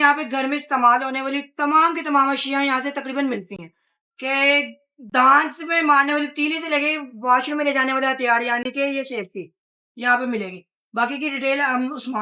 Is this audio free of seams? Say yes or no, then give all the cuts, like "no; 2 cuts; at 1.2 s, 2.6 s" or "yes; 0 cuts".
yes; 0 cuts